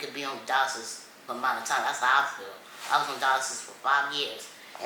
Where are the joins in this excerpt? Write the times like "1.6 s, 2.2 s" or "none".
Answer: none

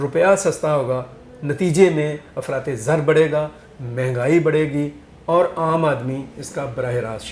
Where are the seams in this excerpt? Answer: none

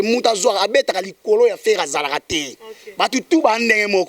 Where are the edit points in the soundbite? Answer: none

